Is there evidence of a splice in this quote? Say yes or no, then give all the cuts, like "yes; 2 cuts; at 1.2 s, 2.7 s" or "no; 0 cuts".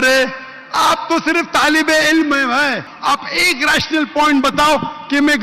yes; 1 cut; at 2.9 s